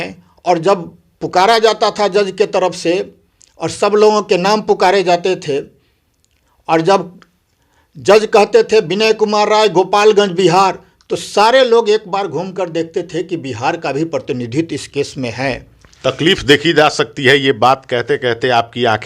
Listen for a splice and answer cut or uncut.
uncut